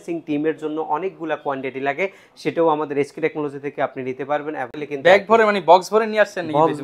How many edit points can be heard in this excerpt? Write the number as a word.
one